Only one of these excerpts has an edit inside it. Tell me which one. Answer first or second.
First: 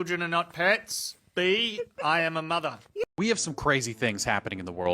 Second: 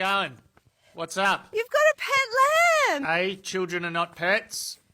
first